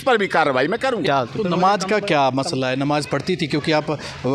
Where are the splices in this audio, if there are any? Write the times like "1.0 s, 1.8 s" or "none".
1.0 s